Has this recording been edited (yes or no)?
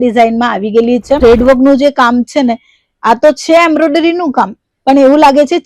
yes